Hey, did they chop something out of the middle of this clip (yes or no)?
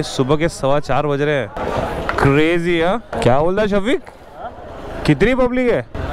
no